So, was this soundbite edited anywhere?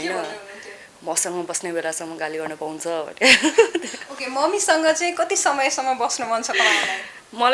no; 0 cuts

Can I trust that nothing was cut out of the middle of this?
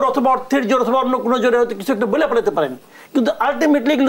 yes; 0 cuts

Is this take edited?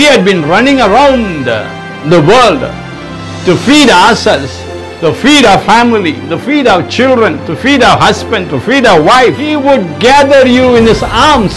yes; 1 cut; at 9.5 s

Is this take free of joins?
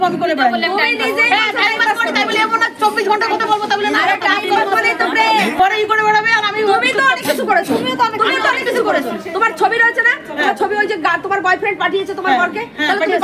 no; 1 cut; at 5.5 s

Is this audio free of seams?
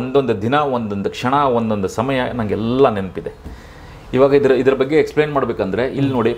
yes; 0 cuts

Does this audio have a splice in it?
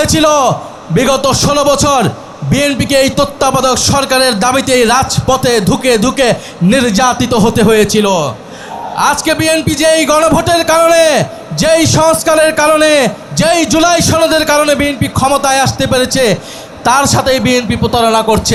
no; 0 cuts

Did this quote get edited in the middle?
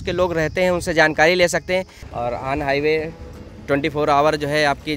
yes; 1 cut; at 2.0 s

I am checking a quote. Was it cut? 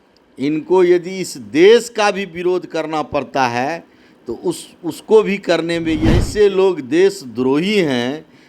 yes; 1 cut; at 6.3 s

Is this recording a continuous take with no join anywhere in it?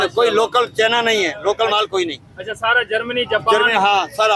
yes; 0 cuts

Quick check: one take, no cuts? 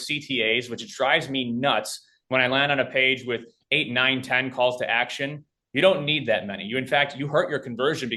yes; 0 cuts

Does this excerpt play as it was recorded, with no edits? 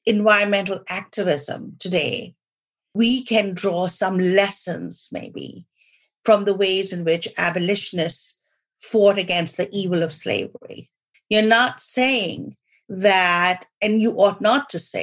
no; 2 cuts; at 2.9 s, 11.1 s

